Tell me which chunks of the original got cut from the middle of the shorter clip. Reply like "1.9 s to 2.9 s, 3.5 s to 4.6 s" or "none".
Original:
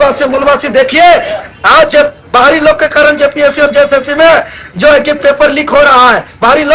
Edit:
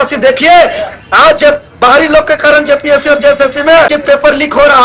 4.5 s to 5.1 s